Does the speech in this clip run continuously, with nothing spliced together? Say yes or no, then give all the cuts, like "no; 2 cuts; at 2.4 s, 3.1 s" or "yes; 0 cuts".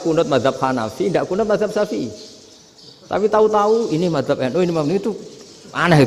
yes; 0 cuts